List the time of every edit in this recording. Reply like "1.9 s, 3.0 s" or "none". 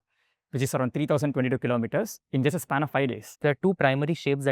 3.3 s